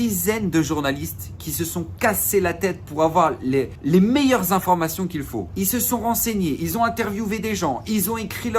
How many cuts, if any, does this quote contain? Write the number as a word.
two